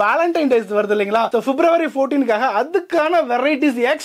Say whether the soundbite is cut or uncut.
uncut